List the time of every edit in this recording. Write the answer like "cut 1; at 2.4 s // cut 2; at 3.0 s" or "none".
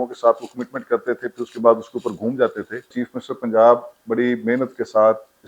cut 1; at 2.9 s